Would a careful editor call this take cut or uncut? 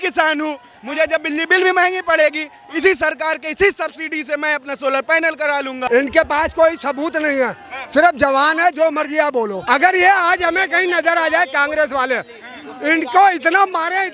cut